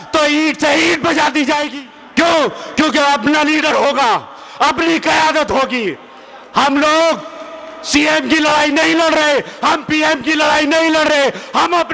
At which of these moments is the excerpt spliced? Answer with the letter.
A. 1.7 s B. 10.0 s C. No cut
A